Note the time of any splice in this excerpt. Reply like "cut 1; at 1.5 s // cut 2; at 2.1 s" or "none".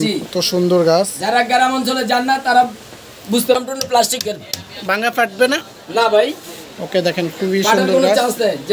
cut 1; at 3.6 s